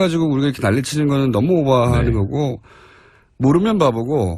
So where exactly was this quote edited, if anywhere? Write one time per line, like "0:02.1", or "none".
0:02.0